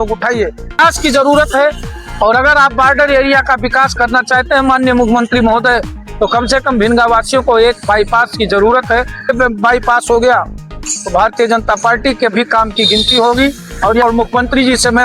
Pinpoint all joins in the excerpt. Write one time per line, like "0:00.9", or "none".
0:00.8
0:09.3
0:14.0